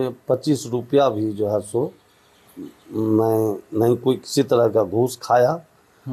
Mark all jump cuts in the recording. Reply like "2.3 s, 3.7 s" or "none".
none